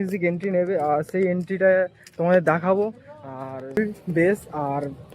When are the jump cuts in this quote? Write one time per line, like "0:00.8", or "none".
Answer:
0:03.8